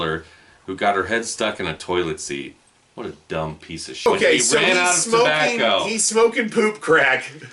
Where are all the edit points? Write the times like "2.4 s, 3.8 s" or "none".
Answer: 4.1 s